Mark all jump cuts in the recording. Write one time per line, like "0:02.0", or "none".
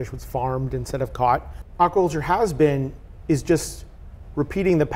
0:01.6